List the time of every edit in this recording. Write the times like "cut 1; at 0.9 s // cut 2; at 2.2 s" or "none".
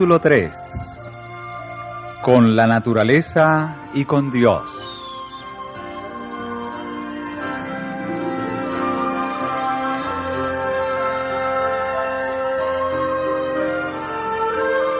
cut 1; at 2.4 s